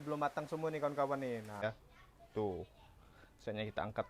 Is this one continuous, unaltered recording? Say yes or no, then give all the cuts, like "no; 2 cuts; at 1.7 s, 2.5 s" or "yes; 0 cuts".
no; 1 cut; at 1.6 s